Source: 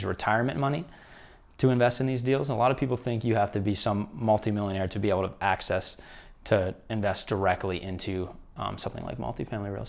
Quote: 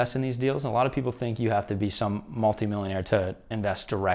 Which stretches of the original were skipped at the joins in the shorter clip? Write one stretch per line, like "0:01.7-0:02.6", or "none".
0:04.9-0:06.4